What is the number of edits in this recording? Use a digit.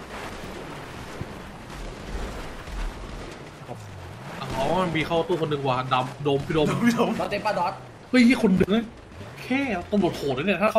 1